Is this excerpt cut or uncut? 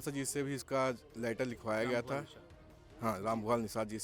uncut